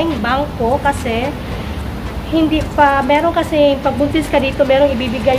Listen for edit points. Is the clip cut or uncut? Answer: uncut